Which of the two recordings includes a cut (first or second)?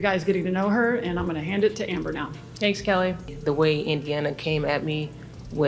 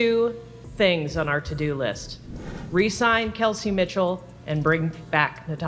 first